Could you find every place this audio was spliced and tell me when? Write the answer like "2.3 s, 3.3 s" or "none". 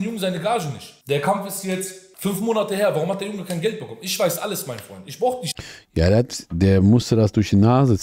none